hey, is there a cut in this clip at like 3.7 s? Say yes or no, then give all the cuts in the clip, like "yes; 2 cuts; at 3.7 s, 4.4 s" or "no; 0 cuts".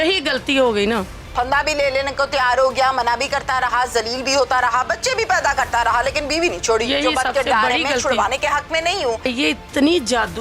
no; 1 cut; at 9.3 s